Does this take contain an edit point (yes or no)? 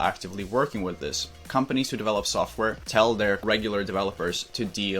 yes